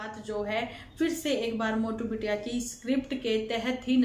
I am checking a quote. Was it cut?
no; 0 cuts

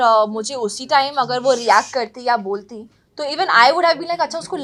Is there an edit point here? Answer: no; 0 cuts

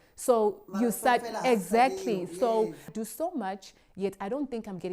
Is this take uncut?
no; 1 cut; at 2.9 s

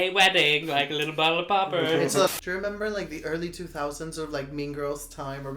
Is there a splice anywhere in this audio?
yes; 1 cut; at 2.3 s

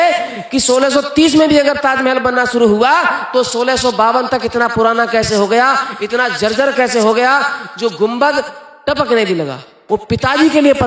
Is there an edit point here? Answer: yes; 1 cut; at 9.8 s

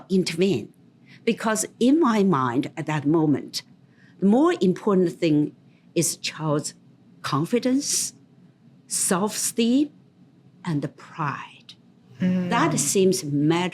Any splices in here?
no; 0 cuts

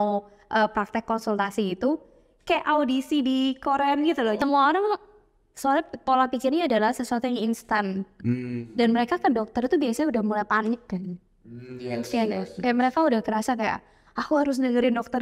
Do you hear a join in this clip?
yes; 1 cut; at 4.4 s

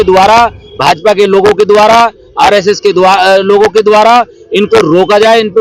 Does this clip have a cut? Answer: no; 0 cuts

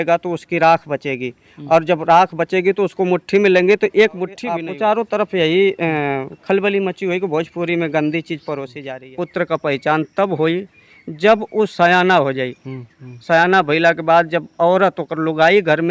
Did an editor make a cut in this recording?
yes; 2 cuts; at 4.6 s, 8.7 s

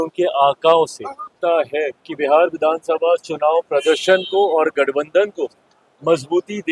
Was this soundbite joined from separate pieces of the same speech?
yes; 1 cut; at 1.3 s

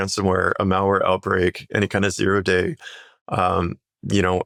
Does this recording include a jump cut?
no; 0 cuts

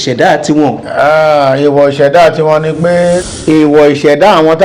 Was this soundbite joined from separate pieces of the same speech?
yes; 1 cut; at 3.2 s

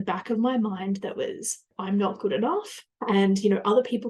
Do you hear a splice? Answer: no; 0 cuts

